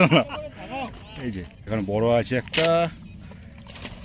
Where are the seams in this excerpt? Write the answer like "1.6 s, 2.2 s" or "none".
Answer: 1.5 s